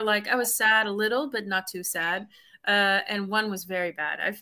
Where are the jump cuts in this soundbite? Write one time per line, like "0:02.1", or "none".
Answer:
none